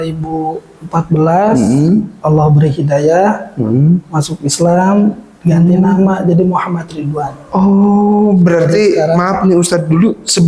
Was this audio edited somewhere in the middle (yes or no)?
no